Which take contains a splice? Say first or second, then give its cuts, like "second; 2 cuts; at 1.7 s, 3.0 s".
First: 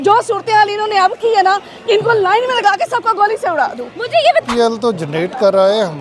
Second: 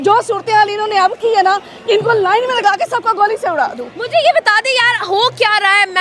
first; 1 cut; at 4.5 s